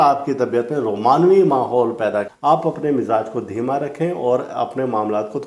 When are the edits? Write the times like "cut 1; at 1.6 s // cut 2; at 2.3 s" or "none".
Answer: cut 1; at 2.3 s